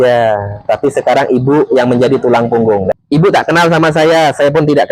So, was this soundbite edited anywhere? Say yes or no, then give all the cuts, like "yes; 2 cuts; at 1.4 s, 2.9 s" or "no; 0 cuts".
yes; 1 cut; at 3.0 s